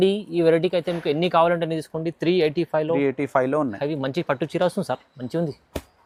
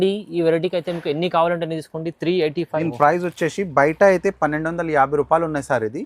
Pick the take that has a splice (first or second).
second